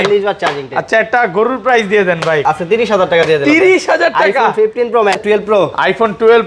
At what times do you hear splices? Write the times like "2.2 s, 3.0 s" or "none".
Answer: 2.4 s, 5.2 s